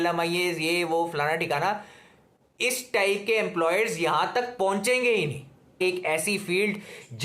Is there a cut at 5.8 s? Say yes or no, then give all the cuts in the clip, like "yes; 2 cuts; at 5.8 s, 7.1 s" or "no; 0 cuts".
yes; 1 cut; at 5.8 s